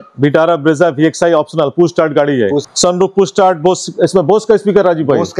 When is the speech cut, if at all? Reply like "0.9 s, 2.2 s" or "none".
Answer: 2.7 s